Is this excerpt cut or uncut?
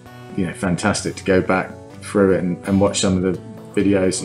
uncut